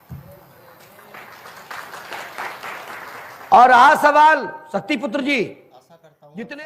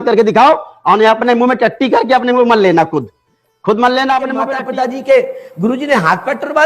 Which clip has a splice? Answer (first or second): second